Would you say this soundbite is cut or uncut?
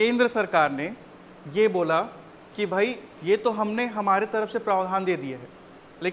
uncut